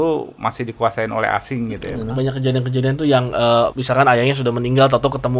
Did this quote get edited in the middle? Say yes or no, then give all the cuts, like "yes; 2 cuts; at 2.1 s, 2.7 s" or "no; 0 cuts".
yes; 2 cuts; at 2.0 s, 3.8 s